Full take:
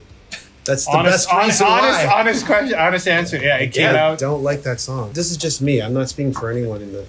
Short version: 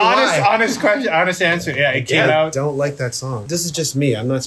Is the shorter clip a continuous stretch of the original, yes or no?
yes